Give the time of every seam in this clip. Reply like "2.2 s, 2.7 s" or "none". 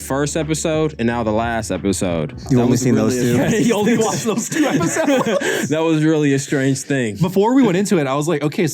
2.4 s, 7.3 s